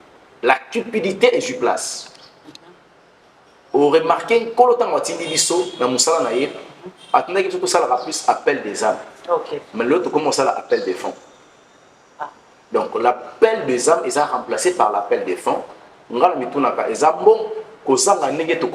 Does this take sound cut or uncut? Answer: uncut